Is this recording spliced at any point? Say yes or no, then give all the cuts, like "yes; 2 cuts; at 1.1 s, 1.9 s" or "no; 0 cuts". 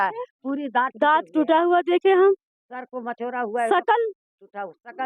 no; 0 cuts